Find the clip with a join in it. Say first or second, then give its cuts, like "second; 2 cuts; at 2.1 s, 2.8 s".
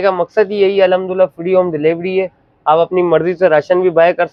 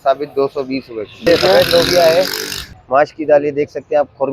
second; 2 cuts; at 1.3 s, 2.7 s